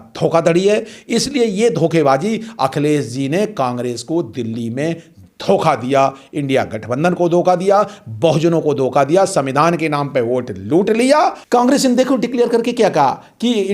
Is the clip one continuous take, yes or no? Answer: no